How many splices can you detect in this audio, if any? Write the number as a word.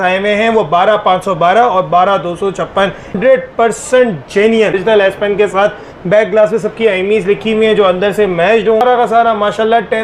three